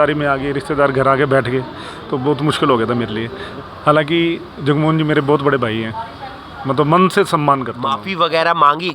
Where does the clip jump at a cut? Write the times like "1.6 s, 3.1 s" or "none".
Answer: 8.0 s